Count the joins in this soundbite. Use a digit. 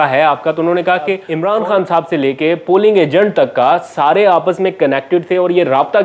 1